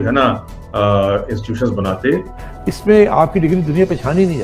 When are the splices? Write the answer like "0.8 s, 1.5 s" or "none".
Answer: 2.5 s